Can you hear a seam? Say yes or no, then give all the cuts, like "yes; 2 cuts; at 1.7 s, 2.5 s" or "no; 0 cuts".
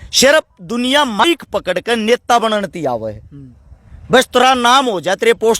yes; 1 cut; at 1.2 s